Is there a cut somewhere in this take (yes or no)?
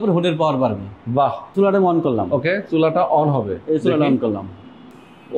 yes